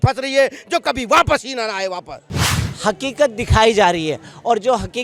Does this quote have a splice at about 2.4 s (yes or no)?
yes